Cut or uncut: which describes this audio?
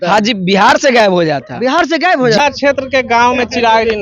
cut